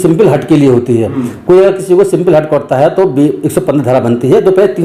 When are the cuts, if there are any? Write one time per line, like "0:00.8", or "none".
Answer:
none